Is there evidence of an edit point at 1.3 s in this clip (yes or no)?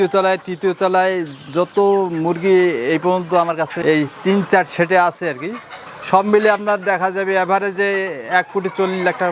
no